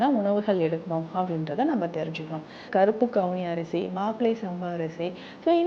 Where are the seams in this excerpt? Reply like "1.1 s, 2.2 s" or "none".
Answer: 2.7 s